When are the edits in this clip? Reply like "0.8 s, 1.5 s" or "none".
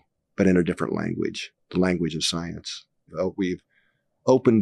3.1 s